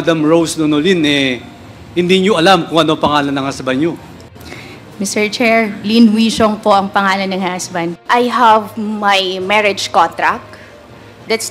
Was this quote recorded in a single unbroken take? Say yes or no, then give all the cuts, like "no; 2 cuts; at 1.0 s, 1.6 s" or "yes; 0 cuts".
no; 1 cut; at 7.9 s